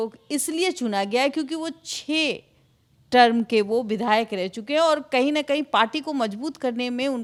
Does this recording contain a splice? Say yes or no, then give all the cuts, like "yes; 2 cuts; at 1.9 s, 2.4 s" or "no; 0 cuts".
no; 0 cuts